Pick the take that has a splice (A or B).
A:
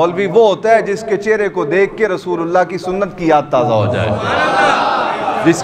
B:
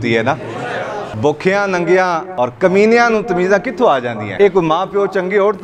B